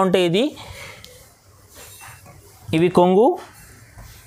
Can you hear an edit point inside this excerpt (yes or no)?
no